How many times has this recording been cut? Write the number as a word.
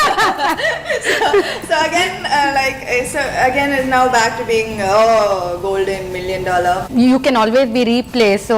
one